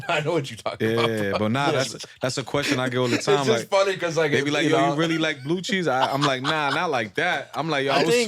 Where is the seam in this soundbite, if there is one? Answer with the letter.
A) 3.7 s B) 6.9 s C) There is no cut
C